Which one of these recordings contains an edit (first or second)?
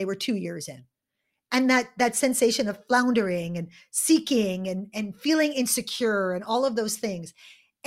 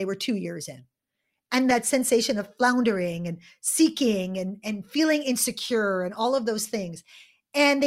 second